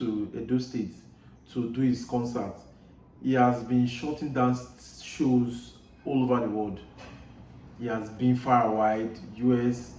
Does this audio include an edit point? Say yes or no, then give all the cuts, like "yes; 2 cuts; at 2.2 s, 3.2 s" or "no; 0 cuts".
no; 0 cuts